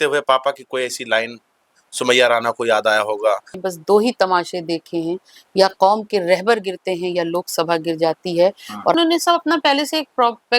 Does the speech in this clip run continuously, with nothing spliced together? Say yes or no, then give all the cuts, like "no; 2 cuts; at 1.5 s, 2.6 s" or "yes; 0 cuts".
no; 2 cuts; at 3.6 s, 9.0 s